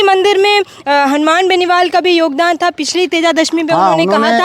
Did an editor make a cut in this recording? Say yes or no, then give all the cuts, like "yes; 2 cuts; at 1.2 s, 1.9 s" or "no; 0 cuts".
no; 0 cuts